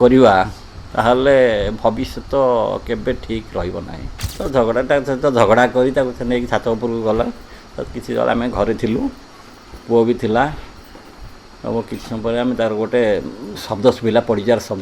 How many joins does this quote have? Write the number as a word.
one